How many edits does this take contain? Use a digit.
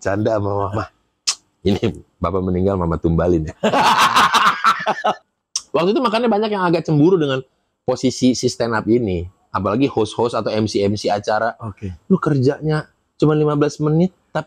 1